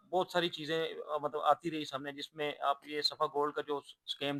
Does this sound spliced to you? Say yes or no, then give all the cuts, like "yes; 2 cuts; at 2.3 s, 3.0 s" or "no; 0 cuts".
no; 0 cuts